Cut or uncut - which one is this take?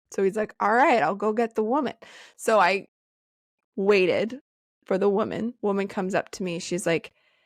cut